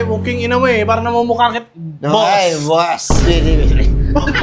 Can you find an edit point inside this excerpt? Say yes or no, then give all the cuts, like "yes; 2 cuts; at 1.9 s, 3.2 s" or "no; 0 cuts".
no; 0 cuts